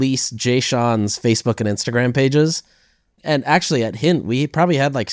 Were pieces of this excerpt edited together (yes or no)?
no